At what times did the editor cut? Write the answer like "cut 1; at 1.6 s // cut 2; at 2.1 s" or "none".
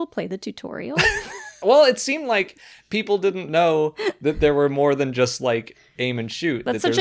cut 1; at 1.6 s